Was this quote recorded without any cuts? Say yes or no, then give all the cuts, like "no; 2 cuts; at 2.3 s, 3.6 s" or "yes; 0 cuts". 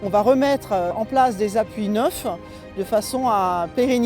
no; 1 cut; at 0.9 s